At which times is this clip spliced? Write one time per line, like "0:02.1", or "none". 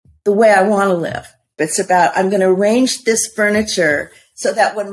0:01.5